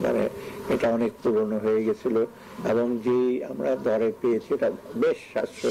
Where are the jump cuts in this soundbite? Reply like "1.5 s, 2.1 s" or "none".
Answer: none